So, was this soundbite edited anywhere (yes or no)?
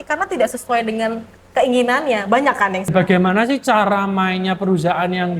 yes